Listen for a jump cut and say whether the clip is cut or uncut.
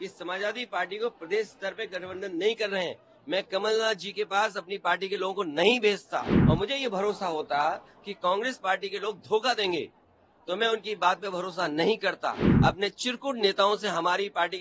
cut